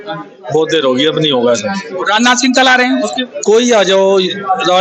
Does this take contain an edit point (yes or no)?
no